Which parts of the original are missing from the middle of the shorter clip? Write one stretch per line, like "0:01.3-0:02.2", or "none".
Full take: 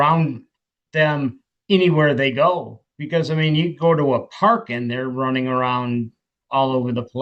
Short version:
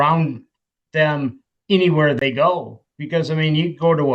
none